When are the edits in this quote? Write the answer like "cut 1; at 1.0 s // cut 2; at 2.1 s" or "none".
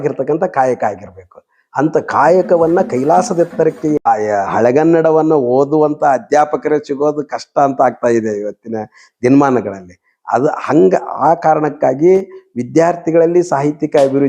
cut 1; at 4.0 s